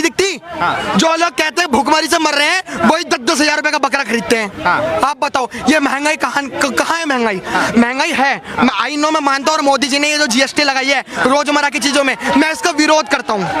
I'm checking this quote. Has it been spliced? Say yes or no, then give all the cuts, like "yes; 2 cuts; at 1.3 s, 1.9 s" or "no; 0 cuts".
no; 0 cuts